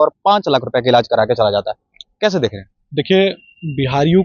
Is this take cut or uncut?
uncut